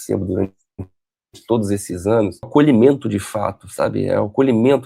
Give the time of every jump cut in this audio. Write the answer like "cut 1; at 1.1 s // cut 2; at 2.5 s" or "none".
cut 1; at 2.5 s